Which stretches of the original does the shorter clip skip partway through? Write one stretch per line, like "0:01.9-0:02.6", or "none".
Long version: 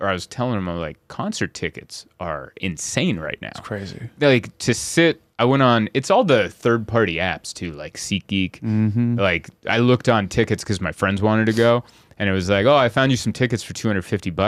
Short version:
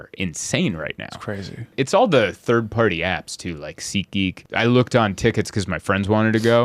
0:04.1-0:05.9
0:08.6-0:09.5